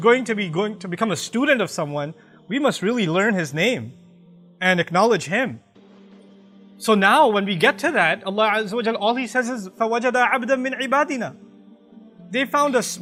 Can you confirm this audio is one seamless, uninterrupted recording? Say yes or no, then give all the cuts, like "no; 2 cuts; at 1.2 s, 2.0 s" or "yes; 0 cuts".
yes; 0 cuts